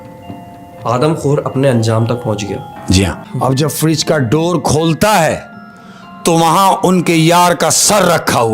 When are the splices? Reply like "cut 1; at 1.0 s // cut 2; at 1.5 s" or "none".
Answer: cut 1; at 3.2 s